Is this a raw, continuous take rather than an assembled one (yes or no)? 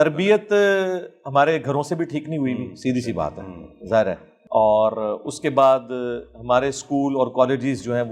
yes